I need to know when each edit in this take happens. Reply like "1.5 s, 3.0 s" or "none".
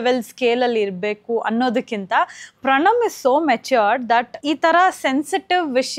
4.3 s